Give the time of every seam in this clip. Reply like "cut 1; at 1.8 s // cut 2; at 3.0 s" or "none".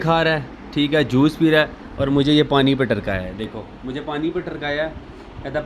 none